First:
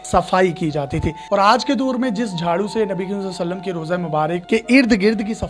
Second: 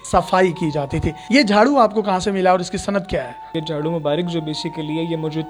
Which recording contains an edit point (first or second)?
first